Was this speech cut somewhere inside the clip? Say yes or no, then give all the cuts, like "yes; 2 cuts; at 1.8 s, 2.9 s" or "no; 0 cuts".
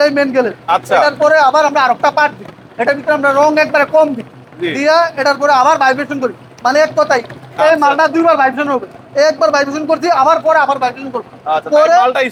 no; 0 cuts